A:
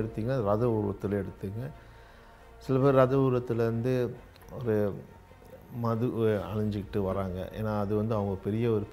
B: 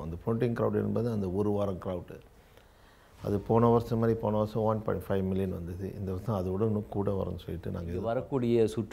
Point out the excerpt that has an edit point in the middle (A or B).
B